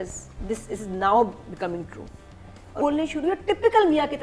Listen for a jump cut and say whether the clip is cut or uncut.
cut